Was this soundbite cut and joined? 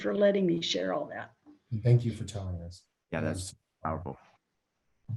no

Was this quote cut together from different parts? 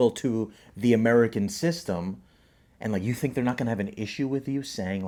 no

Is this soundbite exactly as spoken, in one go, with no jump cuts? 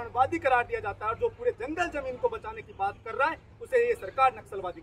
yes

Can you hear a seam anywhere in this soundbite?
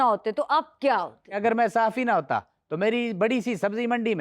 yes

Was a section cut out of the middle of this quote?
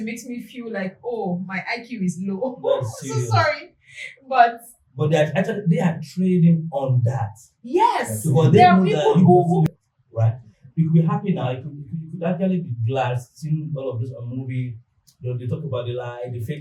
yes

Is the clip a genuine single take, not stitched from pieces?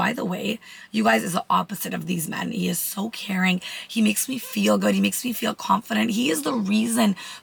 yes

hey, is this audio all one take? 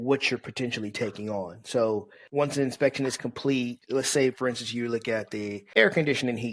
no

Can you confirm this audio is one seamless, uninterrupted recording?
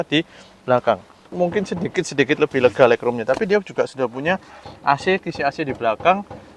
no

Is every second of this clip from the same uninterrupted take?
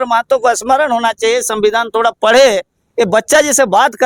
yes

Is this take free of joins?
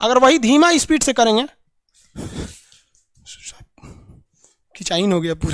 yes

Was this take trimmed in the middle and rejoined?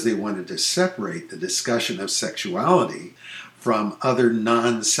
yes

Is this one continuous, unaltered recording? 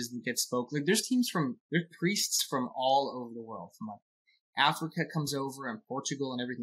yes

